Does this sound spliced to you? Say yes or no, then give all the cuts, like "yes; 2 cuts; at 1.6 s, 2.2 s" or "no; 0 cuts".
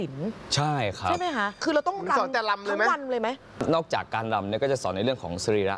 yes; 2 cuts; at 1.6 s, 3.5 s